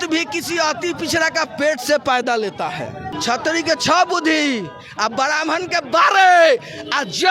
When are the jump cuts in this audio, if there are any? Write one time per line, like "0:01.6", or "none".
0:03.2